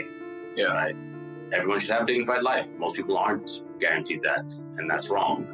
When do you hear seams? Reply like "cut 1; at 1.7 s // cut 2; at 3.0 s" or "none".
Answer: cut 1; at 1.3 s